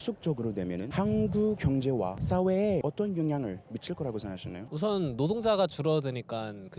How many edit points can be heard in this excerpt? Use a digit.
4